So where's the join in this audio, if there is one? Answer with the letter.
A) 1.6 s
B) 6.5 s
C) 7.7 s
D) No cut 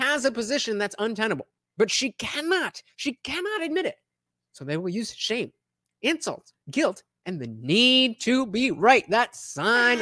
A